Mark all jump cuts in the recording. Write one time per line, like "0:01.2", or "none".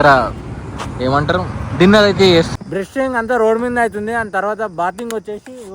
0:02.5